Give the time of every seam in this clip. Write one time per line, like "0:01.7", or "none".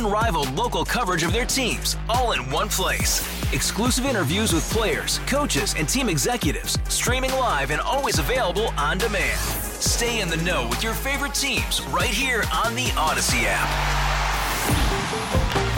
none